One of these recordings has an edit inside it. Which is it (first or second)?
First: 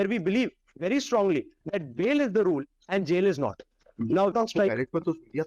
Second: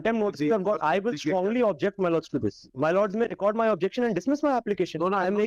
first